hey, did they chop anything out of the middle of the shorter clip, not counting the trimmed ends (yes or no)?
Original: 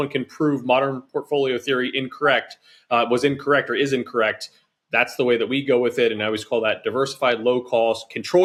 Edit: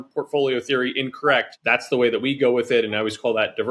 yes